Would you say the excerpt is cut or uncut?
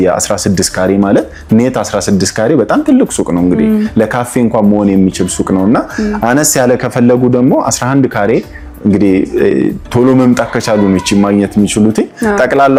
uncut